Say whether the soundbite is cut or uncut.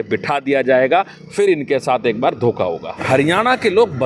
cut